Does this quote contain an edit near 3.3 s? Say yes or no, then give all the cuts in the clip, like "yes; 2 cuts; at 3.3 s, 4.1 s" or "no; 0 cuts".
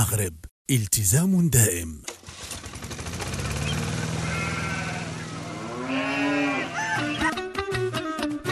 no; 1 cut; at 1.9 s